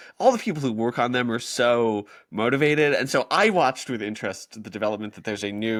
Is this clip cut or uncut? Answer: uncut